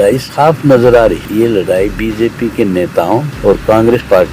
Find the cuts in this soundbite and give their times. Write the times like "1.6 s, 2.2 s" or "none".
1.2 s, 3.3 s